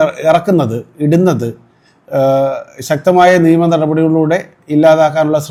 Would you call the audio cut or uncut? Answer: uncut